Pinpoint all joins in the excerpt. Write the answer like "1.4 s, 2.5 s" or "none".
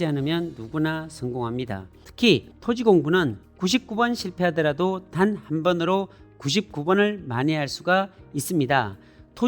2.0 s